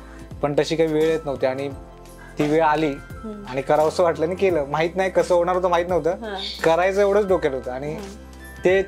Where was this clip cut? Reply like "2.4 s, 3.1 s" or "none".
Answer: none